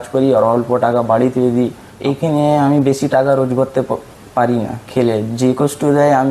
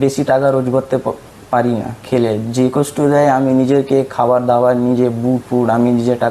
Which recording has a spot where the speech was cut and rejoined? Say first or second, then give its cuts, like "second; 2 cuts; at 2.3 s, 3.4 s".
first; 1 cut; at 1.9 s